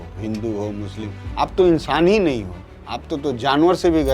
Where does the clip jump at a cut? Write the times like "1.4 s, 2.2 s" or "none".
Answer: none